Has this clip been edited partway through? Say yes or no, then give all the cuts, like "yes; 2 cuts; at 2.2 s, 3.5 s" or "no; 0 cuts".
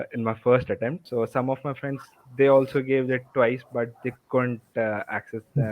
yes; 1 cut; at 1.0 s